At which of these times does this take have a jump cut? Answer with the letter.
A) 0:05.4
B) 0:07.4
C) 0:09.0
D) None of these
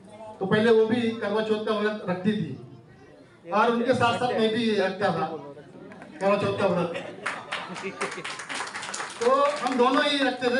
D